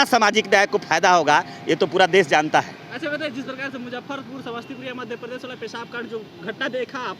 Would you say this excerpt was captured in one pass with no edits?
yes; 0 cuts

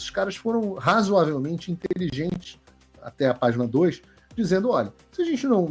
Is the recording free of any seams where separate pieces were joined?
yes; 0 cuts

